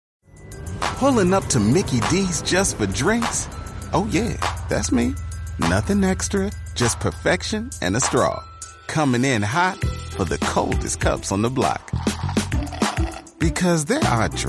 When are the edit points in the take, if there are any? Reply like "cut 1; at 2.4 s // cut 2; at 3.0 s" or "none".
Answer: none